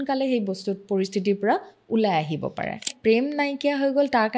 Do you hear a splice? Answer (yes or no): yes